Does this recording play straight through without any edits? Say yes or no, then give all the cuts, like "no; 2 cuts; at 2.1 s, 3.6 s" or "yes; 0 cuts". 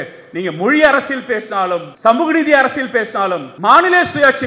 no; 2 cuts; at 1.9 s, 3.5 s